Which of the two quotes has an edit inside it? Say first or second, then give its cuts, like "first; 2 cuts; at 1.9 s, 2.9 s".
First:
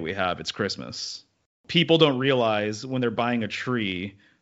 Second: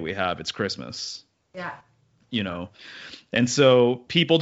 first; 1 cut; at 1.6 s